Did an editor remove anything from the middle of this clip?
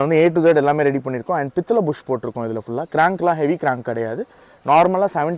no; 0 cuts

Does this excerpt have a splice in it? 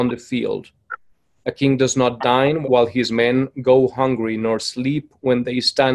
yes; 1 cut; at 2.6 s

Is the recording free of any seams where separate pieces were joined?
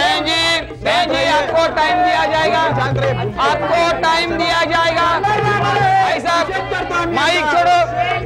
yes; 0 cuts

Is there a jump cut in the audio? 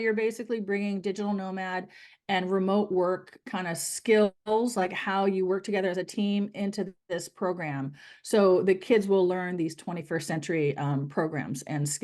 no; 0 cuts

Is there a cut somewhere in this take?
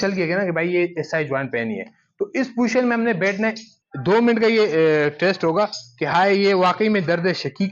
yes; 1 cut; at 3.7 s

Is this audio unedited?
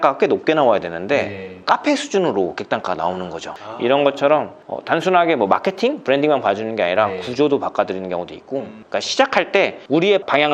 no; 2 cuts; at 3.5 s, 8.7 s

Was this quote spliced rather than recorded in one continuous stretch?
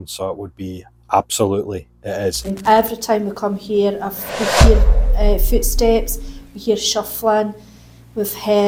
no; 0 cuts

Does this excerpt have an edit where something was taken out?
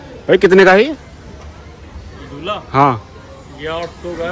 no; 0 cuts

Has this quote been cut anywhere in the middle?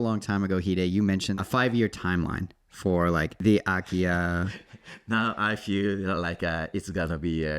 yes; 2 cuts; at 1.3 s, 3.3 s

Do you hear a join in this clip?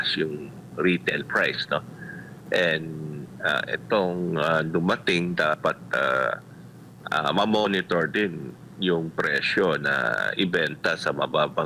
no; 0 cuts

